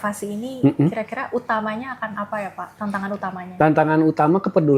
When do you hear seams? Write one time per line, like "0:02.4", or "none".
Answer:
0:02.7